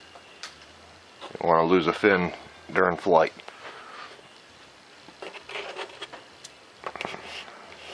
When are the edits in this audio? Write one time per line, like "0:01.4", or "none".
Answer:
0:01.4